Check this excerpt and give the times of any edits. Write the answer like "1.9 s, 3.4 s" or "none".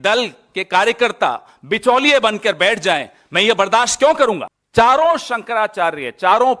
4.5 s